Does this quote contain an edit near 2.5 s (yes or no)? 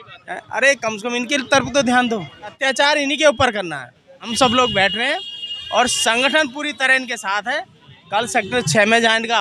yes